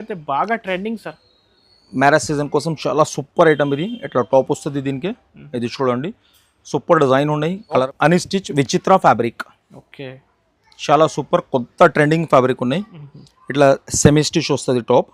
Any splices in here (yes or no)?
yes